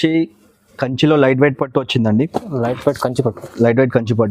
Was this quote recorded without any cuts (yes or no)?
yes